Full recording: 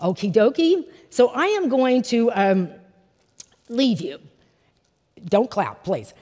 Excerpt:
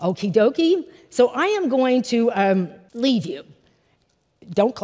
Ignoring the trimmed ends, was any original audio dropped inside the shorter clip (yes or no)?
yes